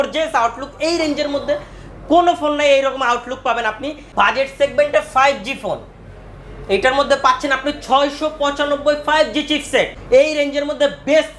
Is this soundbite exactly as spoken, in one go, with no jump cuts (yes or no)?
no